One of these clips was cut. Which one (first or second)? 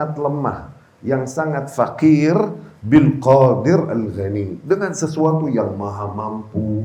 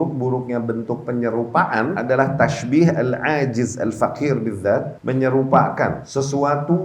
second